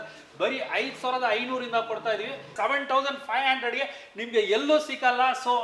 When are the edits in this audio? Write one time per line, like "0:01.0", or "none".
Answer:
0:02.5